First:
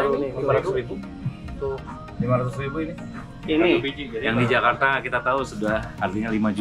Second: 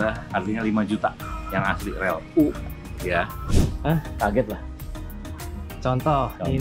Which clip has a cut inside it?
second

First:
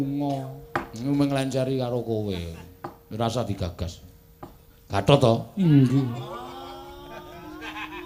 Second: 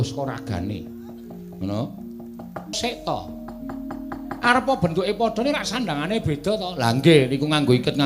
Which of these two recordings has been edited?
second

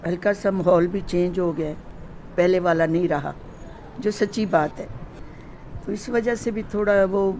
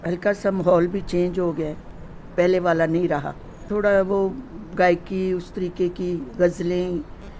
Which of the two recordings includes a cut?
second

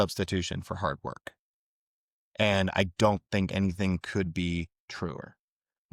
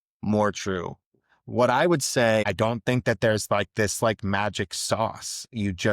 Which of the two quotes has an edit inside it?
second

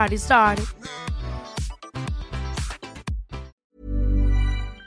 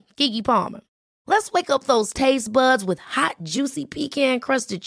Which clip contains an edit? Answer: first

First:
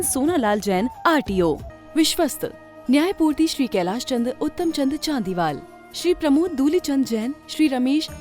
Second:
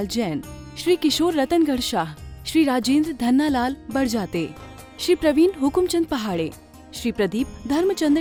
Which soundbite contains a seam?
first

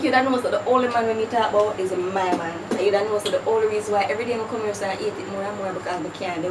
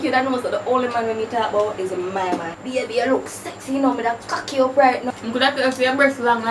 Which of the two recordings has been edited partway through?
second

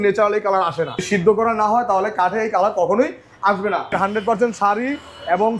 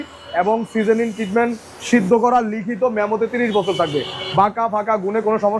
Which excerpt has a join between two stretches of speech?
first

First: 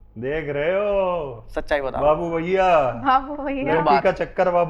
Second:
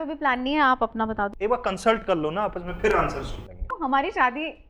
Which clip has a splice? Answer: second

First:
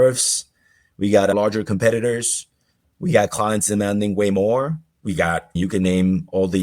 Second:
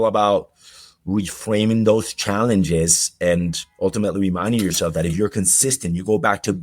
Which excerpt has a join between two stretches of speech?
first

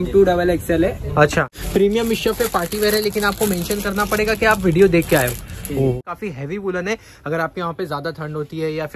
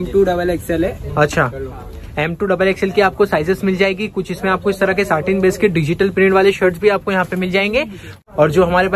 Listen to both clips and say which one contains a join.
first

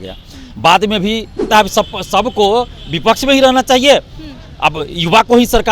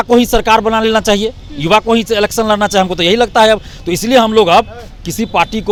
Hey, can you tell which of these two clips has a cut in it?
first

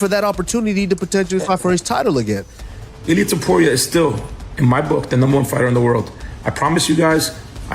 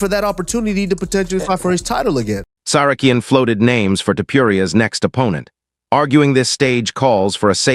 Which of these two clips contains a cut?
first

